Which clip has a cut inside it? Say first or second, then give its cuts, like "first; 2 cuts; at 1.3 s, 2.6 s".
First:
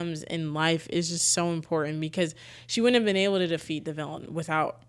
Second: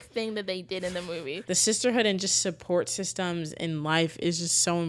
second; 1 cut; at 1.4 s